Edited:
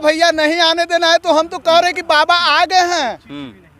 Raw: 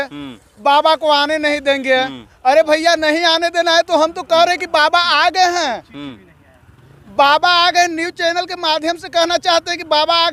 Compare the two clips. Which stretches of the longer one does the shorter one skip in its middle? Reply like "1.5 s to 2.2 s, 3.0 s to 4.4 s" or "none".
none